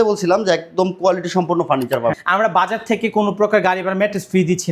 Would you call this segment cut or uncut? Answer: cut